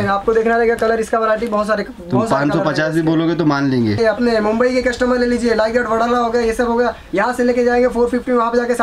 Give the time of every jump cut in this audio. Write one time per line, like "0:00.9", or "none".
0:04.0